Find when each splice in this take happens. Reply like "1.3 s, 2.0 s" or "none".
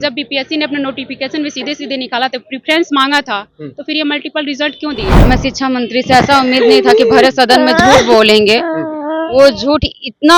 5.2 s